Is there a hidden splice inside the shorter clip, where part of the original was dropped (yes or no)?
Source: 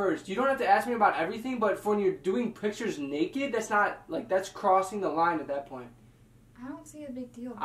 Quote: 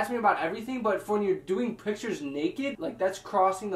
yes